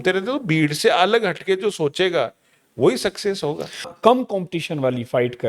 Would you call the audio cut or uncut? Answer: cut